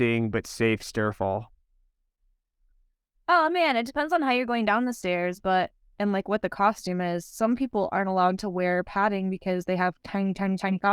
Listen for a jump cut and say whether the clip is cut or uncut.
uncut